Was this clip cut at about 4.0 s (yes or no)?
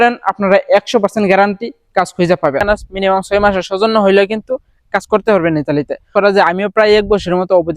no